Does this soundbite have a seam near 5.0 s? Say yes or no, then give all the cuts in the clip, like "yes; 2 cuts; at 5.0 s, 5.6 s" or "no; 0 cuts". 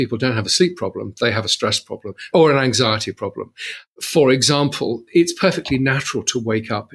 yes; 2 cuts; at 2.3 s, 5.0 s